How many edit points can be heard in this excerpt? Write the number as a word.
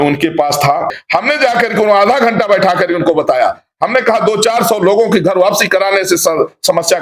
one